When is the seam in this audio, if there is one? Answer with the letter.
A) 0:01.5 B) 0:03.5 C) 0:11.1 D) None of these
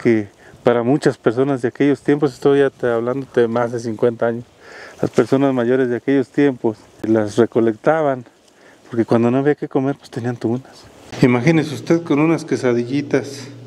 C